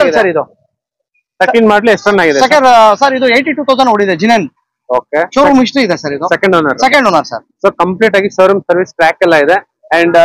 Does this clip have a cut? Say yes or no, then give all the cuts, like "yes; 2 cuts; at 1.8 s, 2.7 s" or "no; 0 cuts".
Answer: no; 0 cuts